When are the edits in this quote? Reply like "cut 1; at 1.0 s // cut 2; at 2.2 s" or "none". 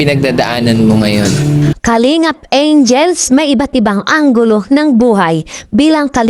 cut 1; at 1.7 s